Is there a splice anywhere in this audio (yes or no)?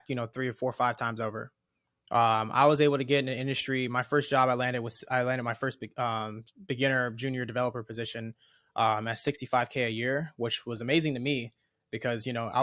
no